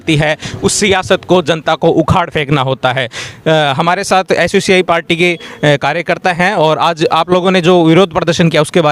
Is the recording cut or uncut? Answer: uncut